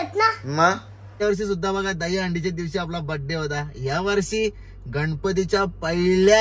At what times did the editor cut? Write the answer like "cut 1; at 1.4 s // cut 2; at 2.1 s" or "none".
cut 1; at 1.2 s